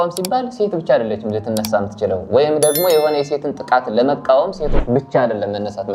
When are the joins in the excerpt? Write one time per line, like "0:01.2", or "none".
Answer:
none